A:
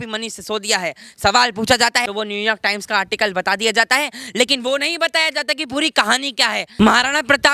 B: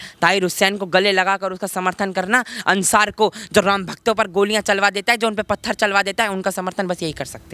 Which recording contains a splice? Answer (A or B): A